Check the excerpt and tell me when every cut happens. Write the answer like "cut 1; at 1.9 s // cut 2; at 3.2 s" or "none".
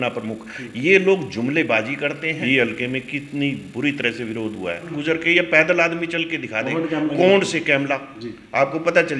cut 1; at 2.4 s // cut 2; at 4.9 s